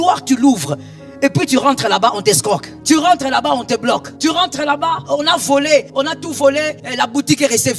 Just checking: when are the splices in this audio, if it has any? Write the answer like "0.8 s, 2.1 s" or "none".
2.7 s, 4.1 s, 5.0 s, 5.9 s, 6.8 s